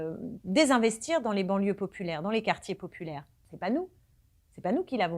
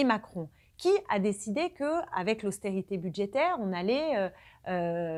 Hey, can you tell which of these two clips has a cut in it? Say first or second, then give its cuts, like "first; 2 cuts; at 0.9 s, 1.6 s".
first; 1 cut; at 3.4 s